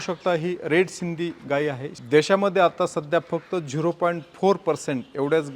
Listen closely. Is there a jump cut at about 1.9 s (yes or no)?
yes